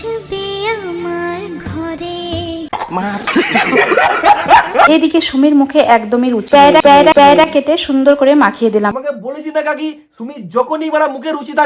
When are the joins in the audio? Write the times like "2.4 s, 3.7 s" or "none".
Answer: 4.9 s, 8.9 s